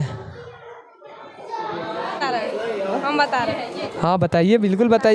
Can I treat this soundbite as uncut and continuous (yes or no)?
no